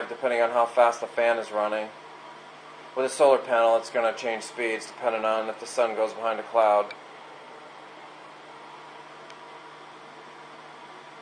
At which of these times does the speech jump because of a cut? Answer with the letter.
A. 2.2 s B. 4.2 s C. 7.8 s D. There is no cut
B